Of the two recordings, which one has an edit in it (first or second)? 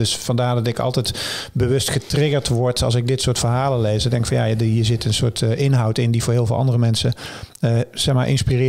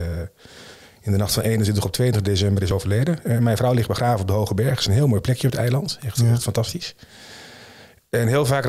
second